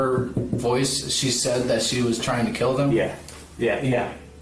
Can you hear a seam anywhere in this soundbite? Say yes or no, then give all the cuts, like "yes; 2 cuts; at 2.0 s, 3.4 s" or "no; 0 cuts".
no; 0 cuts